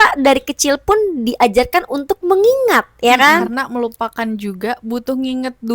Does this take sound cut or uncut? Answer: cut